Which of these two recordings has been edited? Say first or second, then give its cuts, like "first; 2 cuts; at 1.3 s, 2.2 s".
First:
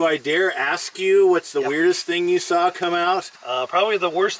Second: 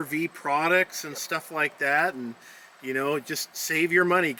first; 1 cut; at 3.3 s